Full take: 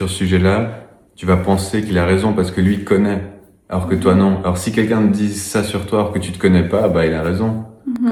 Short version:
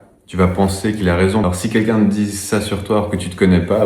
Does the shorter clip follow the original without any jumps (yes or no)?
no